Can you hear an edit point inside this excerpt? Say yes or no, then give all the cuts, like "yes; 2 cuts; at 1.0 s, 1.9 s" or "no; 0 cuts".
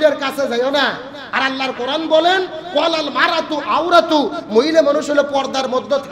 no; 0 cuts